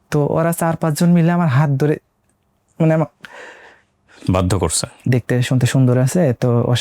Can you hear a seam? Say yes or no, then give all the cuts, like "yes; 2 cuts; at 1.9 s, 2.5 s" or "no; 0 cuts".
yes; 1 cut; at 4.9 s